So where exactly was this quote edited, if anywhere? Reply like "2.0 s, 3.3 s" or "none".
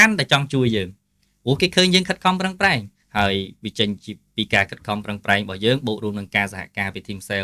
3.0 s